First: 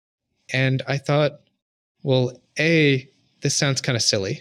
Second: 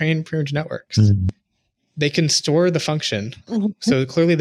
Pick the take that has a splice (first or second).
second